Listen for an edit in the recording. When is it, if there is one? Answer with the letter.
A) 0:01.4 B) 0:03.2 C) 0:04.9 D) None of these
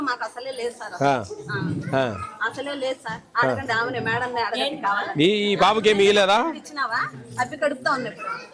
D